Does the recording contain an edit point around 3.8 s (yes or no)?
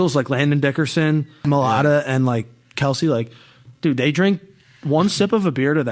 no